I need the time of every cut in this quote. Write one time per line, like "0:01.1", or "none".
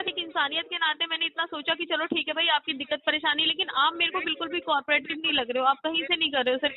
none